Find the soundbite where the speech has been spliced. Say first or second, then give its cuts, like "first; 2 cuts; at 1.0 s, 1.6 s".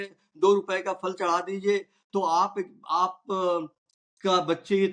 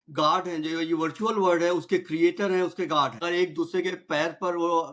second; 1 cut; at 3.2 s